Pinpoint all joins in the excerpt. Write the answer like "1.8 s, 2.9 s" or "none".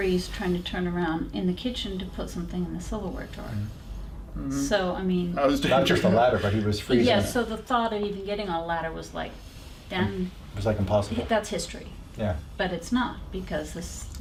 none

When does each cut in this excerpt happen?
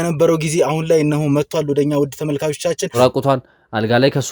3.0 s

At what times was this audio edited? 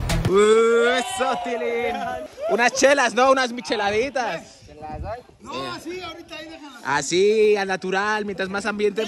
2.3 s

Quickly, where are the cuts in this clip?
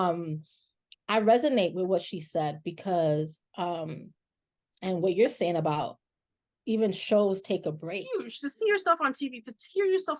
8.0 s

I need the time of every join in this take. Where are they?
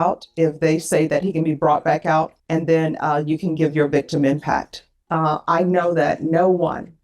2.4 s, 4.9 s

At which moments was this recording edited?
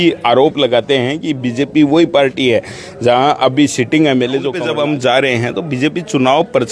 4.6 s

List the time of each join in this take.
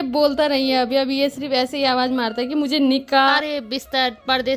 3.3 s

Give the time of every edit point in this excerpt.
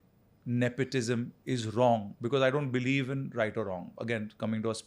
none

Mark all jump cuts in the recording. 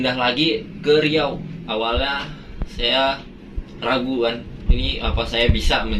1.5 s

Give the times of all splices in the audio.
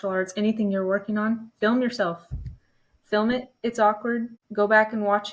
4.4 s

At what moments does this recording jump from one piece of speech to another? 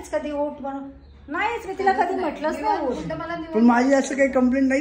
none

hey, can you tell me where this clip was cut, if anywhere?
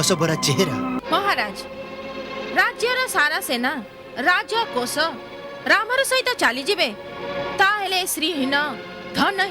1.0 s

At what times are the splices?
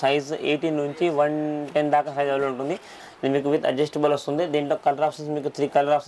2.9 s

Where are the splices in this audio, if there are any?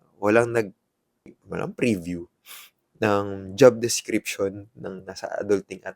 1.4 s

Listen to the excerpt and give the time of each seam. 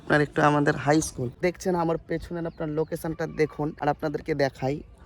1.3 s

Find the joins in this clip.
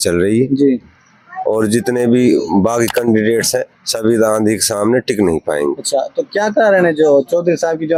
none

